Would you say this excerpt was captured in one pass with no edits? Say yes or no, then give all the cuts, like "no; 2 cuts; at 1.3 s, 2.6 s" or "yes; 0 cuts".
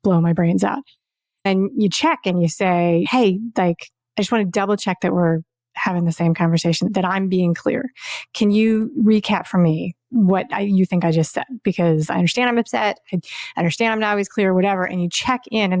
no; 4 cuts; at 1.5 s, 3.1 s, 6.9 s, 10.0 s